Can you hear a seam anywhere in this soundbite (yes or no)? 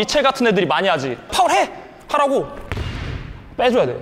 yes